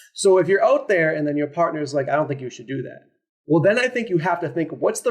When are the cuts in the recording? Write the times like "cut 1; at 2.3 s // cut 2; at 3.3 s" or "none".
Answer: none